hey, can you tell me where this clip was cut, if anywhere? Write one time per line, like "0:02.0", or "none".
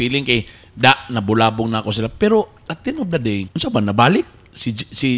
0:03.5